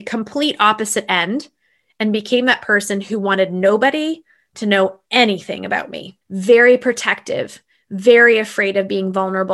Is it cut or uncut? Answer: uncut